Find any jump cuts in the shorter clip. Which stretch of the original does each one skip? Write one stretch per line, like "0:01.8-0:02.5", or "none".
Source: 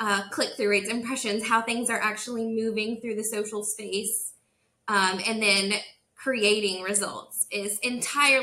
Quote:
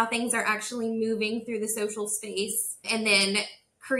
0:04.4-0:05.2